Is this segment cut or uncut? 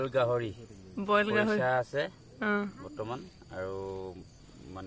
uncut